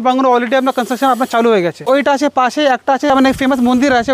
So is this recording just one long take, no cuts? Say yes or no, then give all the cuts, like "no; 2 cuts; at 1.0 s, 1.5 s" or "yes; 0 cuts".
no; 2 cuts; at 1.8 s, 3.1 s